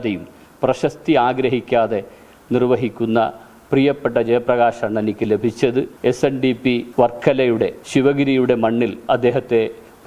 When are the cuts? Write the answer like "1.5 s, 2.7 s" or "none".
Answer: 5.9 s, 6.9 s, 7.8 s

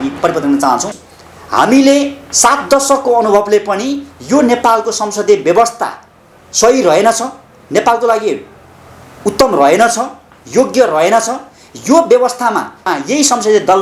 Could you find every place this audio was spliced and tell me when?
1.0 s, 12.7 s

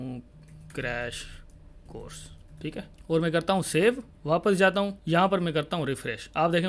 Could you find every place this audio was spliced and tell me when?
2.9 s, 4.1 s, 5.0 s

